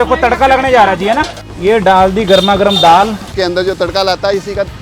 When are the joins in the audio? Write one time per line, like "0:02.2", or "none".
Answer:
0:01.4
0:03.3